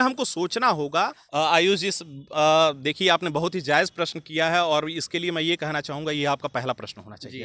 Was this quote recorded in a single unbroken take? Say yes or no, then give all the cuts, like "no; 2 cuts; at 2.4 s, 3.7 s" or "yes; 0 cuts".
no; 1 cut; at 1.2 s